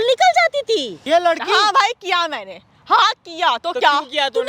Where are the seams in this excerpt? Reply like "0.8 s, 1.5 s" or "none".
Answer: 0.9 s